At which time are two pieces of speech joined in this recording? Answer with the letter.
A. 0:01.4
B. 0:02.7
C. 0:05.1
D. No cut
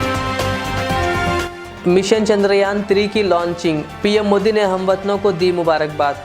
A